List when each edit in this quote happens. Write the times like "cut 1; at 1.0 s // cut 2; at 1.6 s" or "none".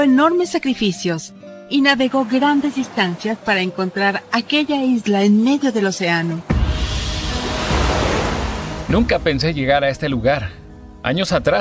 none